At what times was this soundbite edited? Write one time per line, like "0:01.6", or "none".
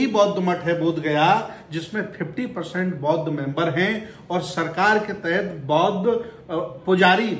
none